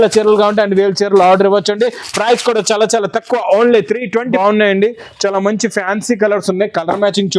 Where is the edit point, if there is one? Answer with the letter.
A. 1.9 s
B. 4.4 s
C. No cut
B